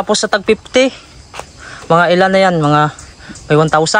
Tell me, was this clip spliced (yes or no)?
no